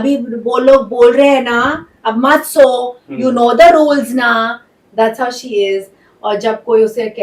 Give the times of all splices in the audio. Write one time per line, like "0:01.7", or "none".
none